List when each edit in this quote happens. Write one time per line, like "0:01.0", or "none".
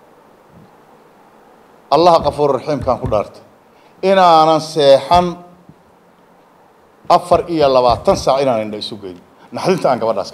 none